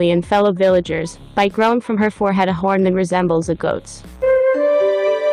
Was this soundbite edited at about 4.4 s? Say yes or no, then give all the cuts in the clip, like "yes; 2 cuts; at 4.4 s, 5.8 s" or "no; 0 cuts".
yes; 1 cut; at 4.4 s